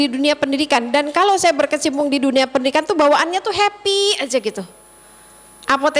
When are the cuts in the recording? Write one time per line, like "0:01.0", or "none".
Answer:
none